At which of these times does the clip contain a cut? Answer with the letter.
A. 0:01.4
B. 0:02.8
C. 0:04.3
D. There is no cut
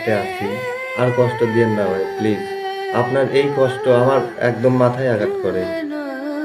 D